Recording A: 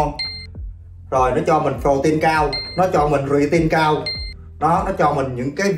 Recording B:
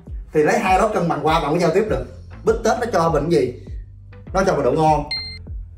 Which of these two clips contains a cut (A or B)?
B